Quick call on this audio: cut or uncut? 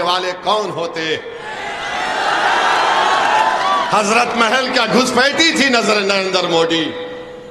uncut